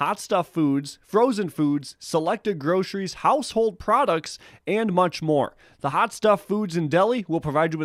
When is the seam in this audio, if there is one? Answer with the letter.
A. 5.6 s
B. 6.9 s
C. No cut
C